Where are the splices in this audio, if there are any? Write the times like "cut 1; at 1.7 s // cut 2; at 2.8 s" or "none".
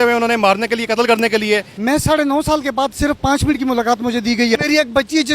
cut 1; at 1.7 s // cut 2; at 4.6 s